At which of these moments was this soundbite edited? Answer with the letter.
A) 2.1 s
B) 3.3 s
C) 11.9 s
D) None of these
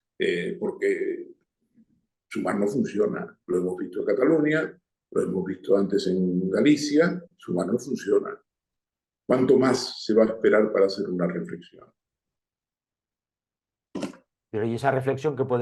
D